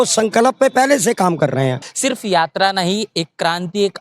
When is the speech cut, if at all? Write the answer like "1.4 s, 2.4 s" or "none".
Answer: 1.9 s